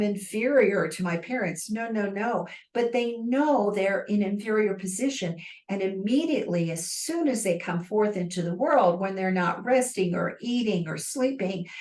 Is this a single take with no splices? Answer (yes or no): yes